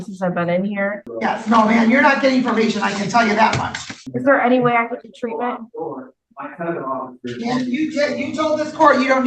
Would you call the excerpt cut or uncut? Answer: cut